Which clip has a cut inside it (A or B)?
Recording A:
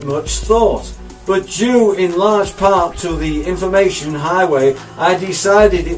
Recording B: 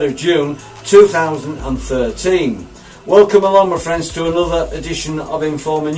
B